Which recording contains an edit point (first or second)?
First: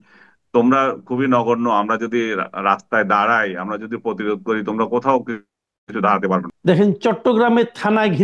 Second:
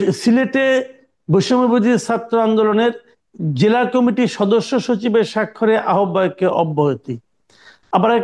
first